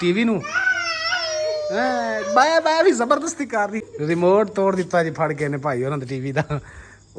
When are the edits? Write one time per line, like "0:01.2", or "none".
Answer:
0:03.8